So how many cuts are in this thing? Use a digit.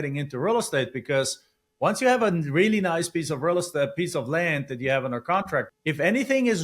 1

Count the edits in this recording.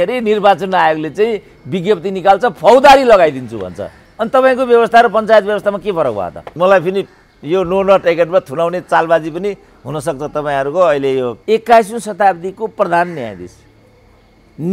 2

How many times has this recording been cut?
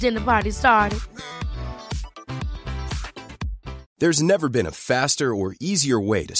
1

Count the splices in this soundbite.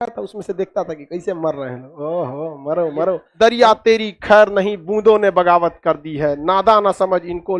1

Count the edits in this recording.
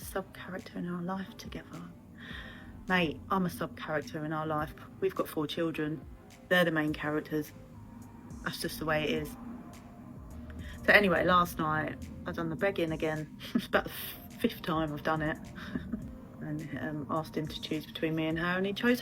2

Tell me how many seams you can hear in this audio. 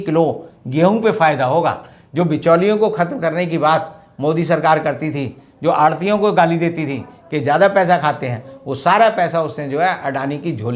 0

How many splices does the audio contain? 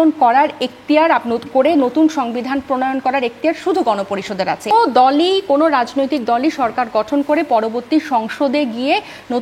1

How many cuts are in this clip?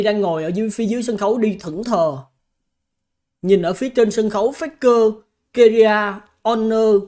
0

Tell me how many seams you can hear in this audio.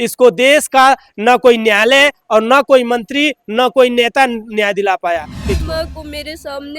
1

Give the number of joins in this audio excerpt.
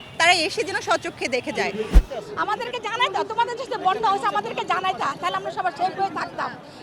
1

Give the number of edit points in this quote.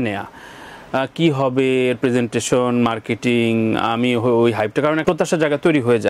1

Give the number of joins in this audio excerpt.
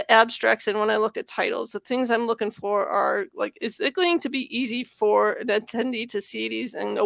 0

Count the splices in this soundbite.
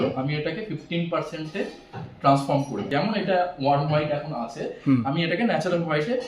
1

